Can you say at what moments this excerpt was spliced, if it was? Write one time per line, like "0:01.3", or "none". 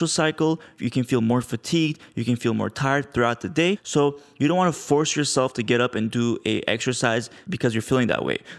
0:03.8
0:07.4